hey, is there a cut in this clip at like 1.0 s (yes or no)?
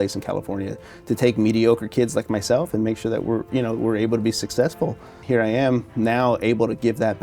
no